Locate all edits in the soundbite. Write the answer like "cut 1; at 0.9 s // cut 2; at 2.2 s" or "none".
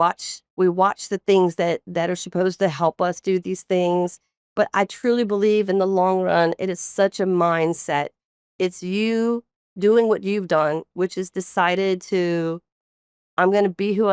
cut 1; at 4.4 s

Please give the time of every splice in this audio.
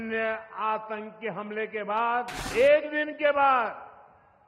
cut 1; at 2.4 s

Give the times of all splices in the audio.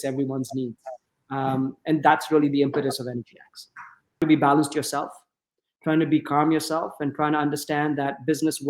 cut 1; at 4.2 s

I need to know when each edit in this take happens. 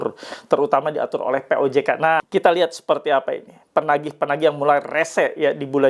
cut 1; at 2.3 s

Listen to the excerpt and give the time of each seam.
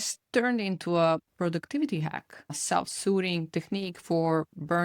cut 1; at 1.3 s // cut 2; at 2.6 s

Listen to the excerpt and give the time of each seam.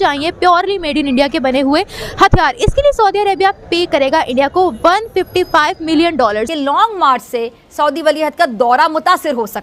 cut 1; at 6.5 s

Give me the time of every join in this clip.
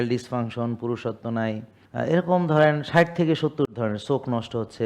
cut 1; at 1.8 s

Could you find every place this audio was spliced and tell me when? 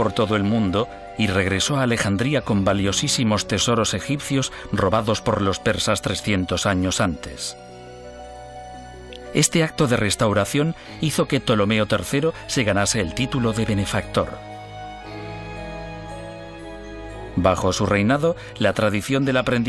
cut 1; at 14.3 s

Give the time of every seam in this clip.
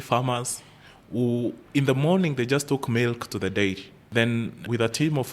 none

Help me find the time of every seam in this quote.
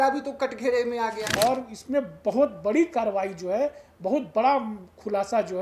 cut 1; at 1.2 s

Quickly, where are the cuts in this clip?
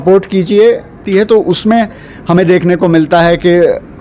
cut 1; at 1.0 s

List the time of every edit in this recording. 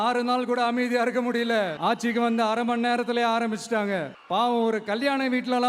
cut 1; at 1.7 s

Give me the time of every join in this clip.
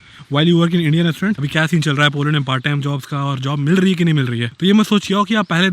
cut 1; at 1.4 s // cut 2; at 4.5 s

